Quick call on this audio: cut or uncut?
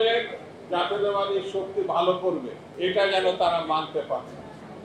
cut